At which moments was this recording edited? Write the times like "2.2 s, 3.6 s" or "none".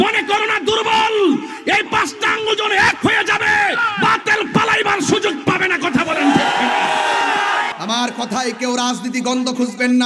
7.7 s